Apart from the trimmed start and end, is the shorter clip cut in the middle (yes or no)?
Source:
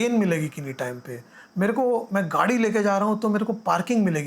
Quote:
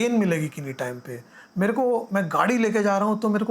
no